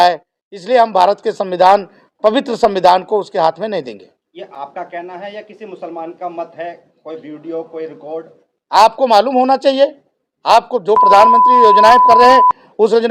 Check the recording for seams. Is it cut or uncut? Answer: uncut